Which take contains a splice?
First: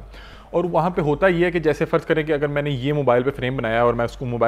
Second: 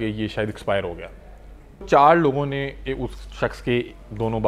second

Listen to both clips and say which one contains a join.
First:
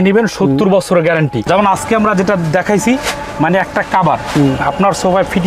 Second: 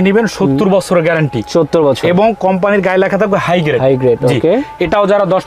first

